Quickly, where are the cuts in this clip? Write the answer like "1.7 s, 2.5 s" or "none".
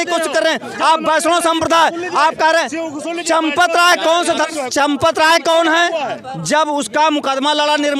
none